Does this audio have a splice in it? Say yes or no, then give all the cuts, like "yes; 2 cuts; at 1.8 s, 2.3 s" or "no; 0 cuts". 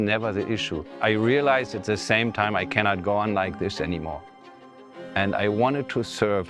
yes; 1 cut; at 0.9 s